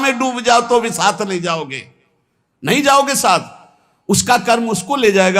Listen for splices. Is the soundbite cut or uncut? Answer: uncut